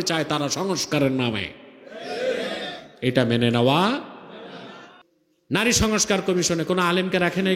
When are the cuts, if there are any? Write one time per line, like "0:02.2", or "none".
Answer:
0:04.9